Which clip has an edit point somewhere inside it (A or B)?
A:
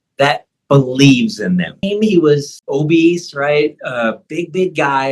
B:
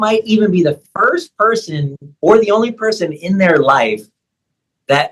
A